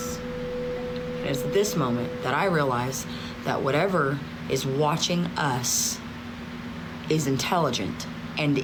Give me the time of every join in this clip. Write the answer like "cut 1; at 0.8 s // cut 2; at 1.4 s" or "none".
none